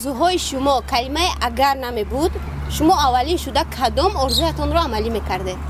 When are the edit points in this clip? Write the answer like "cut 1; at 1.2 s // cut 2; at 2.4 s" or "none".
none

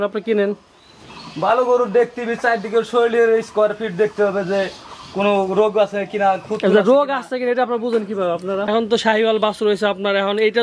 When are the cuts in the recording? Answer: cut 1; at 8.7 s

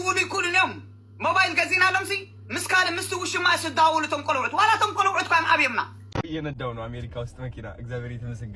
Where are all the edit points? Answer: cut 1; at 6.2 s

